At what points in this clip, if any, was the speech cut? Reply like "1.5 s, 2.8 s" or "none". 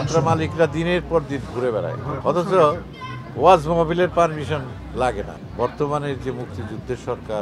2.1 s, 5.3 s